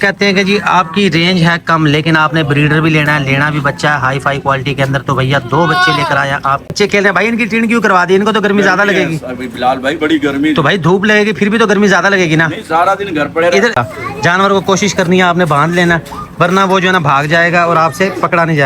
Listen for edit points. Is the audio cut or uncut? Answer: cut